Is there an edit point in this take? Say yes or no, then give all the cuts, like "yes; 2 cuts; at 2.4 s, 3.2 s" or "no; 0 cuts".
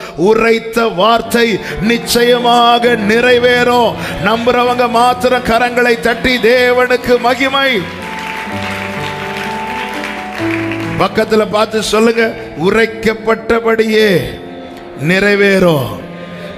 no; 0 cuts